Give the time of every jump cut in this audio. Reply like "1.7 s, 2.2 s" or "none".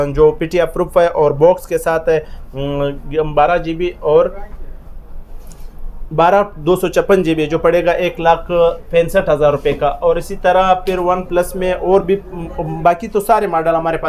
none